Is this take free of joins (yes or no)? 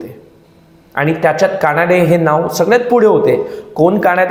yes